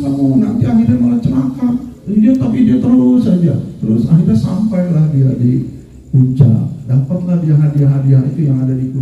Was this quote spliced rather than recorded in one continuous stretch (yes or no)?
yes